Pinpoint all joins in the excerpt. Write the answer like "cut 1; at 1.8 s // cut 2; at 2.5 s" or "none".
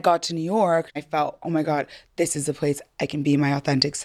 cut 1; at 1.0 s